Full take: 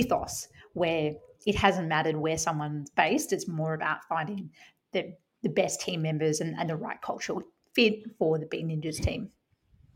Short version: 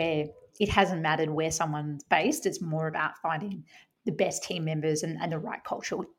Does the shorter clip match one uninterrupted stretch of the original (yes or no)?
no